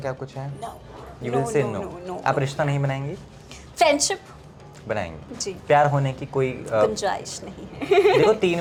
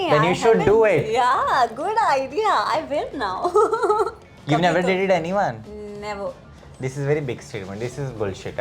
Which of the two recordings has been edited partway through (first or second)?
second